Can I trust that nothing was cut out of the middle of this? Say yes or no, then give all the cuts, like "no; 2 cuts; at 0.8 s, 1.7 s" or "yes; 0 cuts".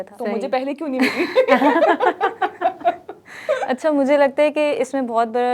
yes; 0 cuts